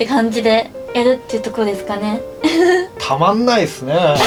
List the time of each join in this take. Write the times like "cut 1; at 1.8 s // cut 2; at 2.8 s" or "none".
none